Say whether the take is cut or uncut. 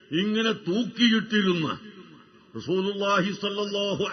cut